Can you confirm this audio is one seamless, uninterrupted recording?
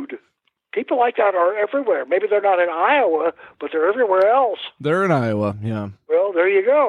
no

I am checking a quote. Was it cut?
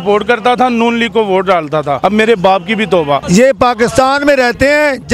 yes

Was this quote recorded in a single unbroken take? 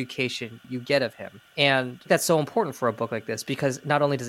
no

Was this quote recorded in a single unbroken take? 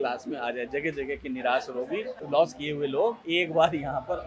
no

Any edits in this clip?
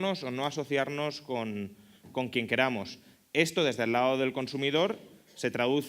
no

